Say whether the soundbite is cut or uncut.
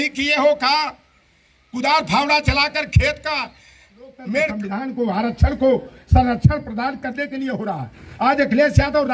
cut